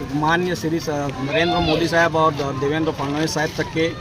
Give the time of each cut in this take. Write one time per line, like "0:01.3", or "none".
0:01.2